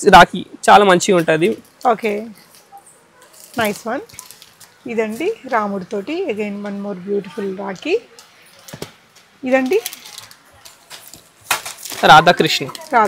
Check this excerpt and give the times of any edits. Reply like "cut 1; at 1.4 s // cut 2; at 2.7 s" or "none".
none